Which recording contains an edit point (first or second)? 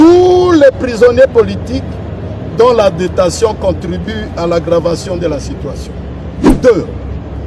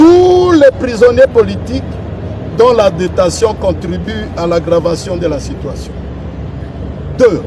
first